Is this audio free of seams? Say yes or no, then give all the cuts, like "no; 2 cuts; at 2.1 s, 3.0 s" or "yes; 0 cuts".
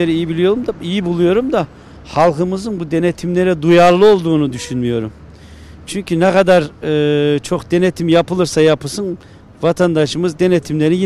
yes; 0 cuts